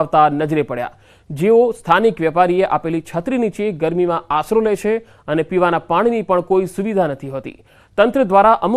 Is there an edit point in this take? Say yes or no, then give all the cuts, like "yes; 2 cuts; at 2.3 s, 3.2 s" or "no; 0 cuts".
no; 0 cuts